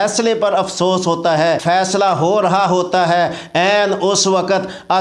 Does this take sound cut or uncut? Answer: cut